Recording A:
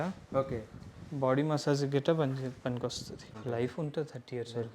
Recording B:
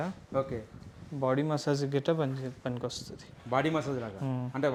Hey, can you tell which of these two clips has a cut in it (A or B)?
A